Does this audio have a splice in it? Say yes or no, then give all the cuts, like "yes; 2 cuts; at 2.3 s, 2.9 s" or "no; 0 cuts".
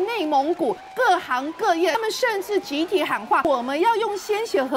yes; 3 cuts; at 0.8 s, 2.0 s, 3.4 s